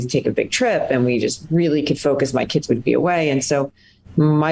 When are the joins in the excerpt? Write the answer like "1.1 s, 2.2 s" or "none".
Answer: none

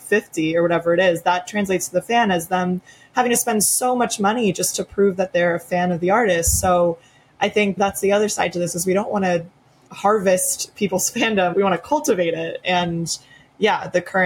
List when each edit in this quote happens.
none

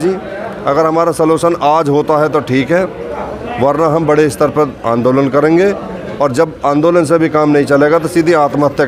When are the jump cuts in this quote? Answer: none

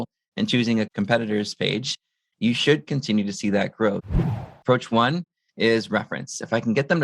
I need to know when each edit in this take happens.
4.1 s

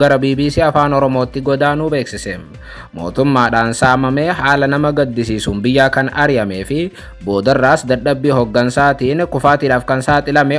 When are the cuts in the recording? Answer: none

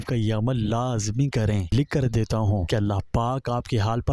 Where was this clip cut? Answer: 1.7 s, 2.6 s

